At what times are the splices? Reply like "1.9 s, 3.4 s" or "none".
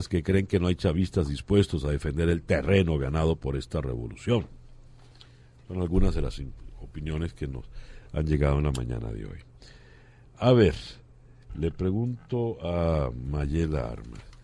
9.6 s